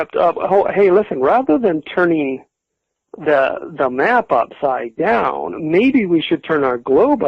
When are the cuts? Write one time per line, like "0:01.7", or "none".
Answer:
none